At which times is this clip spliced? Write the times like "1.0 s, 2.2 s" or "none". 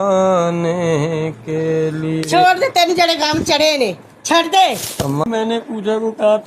5.2 s